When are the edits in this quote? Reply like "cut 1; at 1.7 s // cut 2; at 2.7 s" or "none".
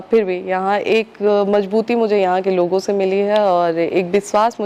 none